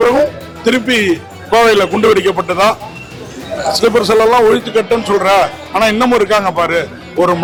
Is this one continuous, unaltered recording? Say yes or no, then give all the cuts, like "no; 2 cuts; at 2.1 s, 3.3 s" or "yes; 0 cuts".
yes; 0 cuts